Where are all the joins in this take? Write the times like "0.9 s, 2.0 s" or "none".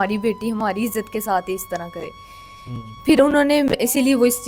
none